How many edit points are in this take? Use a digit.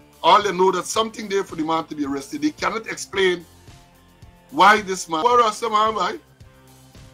1